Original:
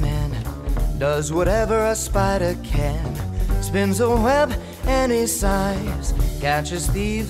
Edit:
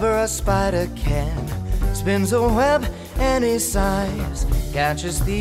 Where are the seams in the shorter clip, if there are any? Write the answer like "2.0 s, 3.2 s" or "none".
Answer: none

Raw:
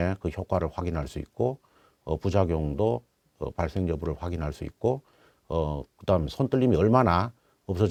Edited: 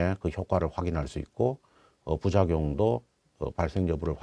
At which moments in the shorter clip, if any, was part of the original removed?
none

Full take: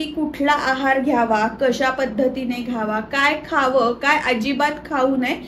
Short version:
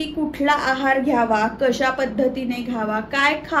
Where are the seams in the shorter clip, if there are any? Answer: none

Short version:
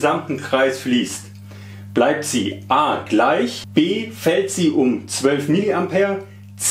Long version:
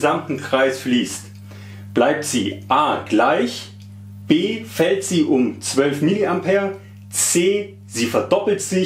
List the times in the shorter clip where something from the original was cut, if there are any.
3.6 s

